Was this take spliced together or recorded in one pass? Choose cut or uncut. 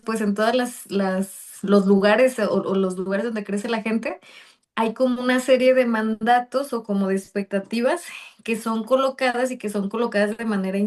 uncut